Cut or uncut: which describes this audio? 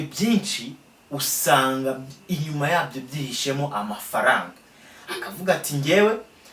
uncut